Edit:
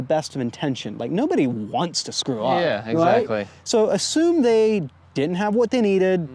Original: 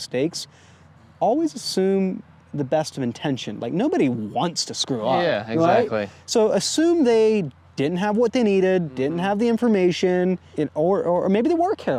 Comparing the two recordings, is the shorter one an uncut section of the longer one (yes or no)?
yes